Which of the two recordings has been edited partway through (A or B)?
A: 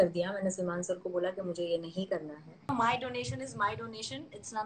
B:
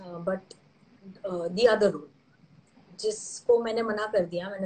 A